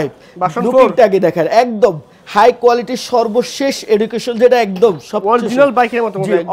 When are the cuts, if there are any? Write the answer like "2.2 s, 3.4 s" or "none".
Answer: none